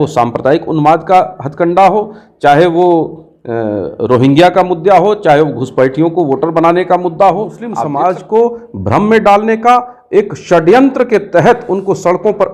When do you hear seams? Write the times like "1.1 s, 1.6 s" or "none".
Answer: 7.7 s